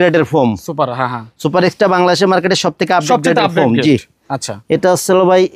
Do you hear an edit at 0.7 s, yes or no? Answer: no